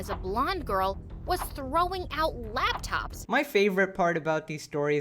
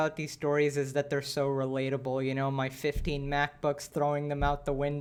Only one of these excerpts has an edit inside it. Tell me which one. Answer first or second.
first